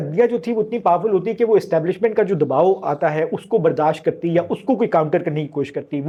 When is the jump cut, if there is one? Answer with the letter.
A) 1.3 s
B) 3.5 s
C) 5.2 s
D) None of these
D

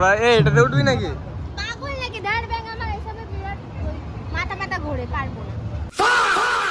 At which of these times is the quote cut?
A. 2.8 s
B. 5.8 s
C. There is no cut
B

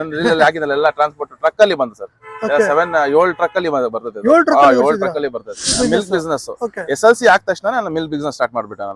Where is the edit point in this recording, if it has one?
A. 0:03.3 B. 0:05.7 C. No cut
B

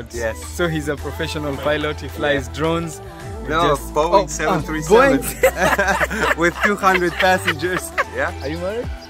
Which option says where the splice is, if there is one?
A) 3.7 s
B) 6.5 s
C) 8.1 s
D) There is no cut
C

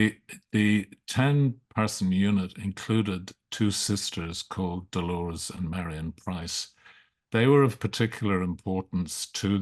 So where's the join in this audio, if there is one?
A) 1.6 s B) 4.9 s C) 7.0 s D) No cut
D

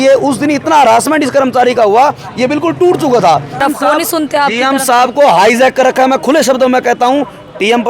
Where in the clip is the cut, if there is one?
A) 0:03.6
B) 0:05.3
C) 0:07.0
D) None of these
A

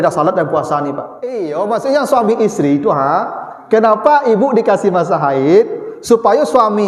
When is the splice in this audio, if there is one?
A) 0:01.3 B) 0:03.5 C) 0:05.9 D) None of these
A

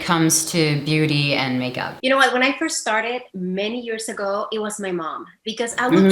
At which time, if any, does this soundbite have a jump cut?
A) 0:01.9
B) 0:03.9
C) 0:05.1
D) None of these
A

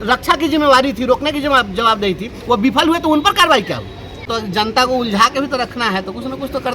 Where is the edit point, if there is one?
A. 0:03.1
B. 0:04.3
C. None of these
B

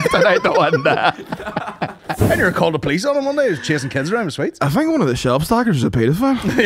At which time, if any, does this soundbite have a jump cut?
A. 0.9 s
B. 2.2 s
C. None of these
B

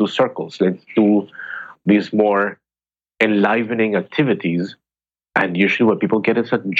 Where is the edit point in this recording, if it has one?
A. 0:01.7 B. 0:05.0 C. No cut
A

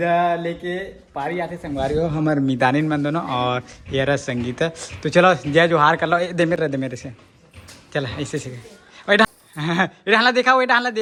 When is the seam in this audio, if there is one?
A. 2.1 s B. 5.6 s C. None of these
C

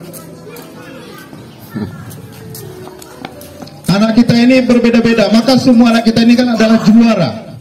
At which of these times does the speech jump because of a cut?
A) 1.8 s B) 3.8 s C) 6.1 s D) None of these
D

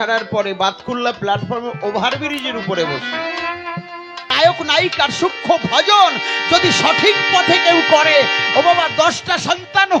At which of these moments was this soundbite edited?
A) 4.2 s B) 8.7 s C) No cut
A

